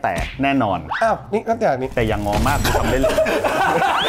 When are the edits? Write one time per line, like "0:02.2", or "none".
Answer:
none